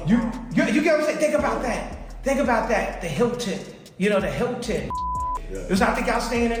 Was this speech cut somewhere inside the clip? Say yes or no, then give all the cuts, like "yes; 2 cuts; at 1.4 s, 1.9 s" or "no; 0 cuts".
no; 0 cuts